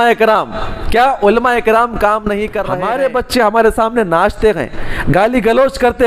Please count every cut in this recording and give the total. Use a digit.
1